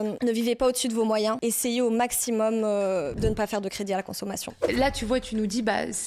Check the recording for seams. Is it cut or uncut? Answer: cut